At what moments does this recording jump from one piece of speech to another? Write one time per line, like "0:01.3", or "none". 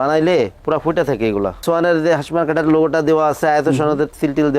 0:01.6